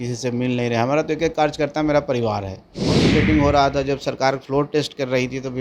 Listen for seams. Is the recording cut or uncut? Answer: cut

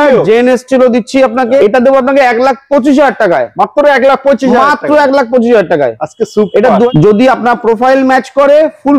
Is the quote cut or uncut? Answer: cut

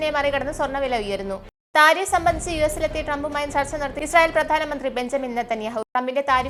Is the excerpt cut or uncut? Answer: uncut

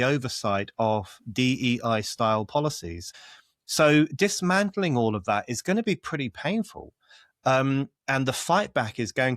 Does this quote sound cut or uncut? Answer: cut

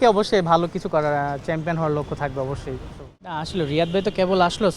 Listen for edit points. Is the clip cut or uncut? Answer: cut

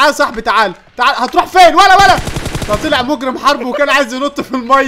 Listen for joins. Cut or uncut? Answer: uncut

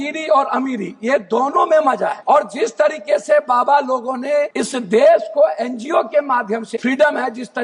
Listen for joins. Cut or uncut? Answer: cut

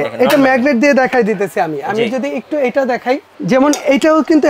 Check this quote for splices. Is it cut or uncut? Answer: cut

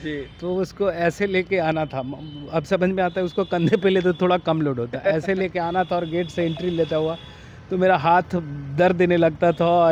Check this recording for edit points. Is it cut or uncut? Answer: uncut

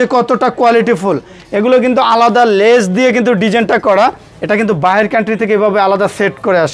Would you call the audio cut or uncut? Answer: uncut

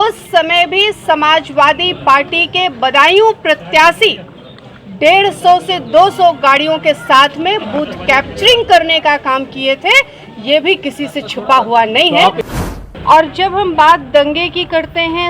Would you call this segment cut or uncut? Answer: cut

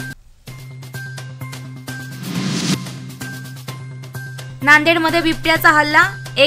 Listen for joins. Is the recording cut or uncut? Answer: cut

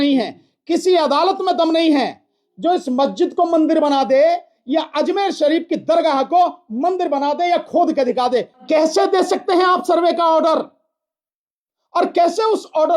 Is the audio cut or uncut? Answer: cut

